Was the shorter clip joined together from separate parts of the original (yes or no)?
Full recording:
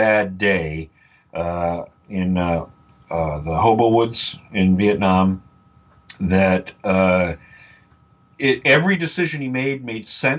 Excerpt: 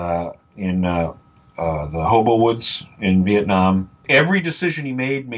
yes